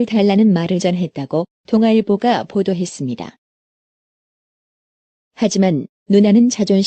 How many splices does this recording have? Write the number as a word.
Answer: one